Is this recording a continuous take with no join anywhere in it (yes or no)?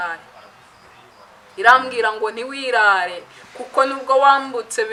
yes